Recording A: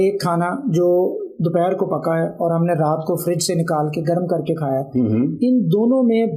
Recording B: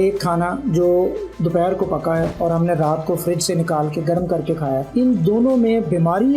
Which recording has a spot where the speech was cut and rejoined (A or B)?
B